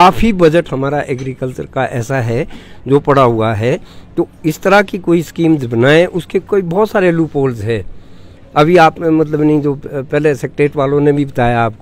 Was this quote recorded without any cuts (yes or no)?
yes